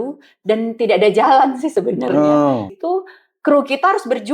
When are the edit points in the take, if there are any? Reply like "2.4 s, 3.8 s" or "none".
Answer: 2.7 s